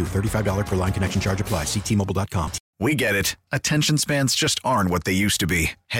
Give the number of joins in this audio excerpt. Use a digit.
1